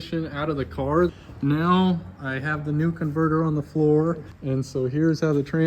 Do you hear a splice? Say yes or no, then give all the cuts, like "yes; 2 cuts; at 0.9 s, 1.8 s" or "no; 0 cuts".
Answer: yes; 2 cuts; at 1.1 s, 4.3 s